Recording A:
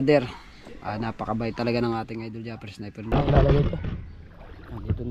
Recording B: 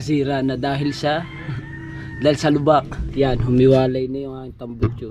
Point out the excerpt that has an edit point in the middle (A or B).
A